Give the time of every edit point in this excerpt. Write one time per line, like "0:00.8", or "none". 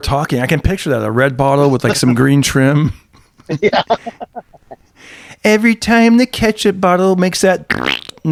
none